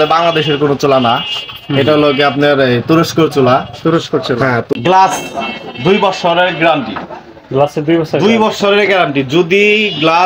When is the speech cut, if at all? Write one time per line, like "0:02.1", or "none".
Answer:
0:04.7